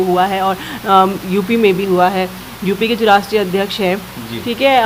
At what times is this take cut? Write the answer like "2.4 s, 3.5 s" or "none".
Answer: none